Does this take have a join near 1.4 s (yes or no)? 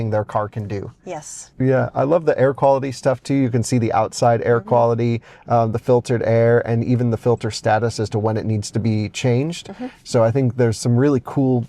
yes